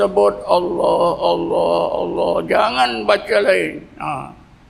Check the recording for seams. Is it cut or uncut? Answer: uncut